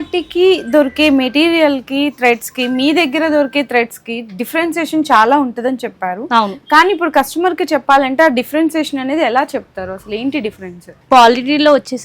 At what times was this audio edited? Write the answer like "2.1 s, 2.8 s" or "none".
none